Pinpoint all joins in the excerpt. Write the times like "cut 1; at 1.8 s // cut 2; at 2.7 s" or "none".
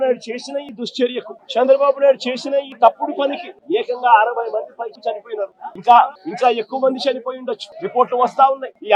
none